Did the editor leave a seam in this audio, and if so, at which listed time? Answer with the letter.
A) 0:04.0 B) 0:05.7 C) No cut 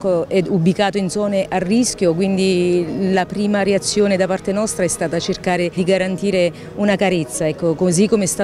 B